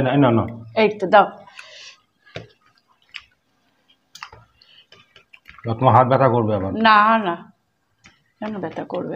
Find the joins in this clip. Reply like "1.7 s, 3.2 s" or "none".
none